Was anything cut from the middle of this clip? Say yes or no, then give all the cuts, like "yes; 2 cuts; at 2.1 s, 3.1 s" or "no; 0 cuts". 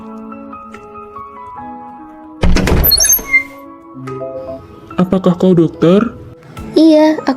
yes; 1 cut; at 1.0 s